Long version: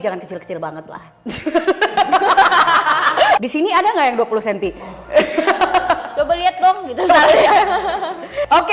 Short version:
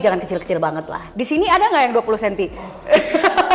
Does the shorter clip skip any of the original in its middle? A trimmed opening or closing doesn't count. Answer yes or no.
yes